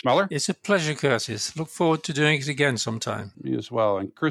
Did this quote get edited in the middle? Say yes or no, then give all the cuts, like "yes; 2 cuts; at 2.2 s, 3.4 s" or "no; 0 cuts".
no; 0 cuts